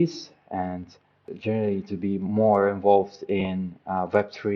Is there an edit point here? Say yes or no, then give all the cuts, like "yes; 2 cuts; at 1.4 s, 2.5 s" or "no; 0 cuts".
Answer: yes; 1 cut; at 1.2 s